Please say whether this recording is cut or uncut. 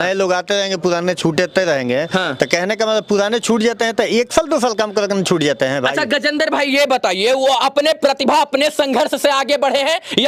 uncut